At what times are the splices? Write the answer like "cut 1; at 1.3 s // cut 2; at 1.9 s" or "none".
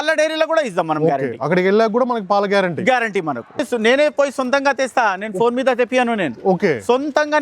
cut 1; at 3.7 s